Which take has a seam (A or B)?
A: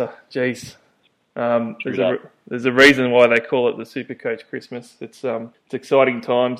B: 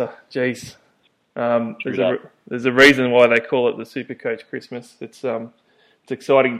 A